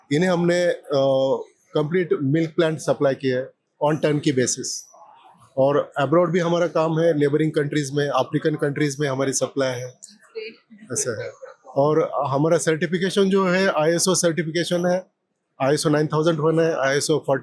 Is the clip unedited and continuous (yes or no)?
yes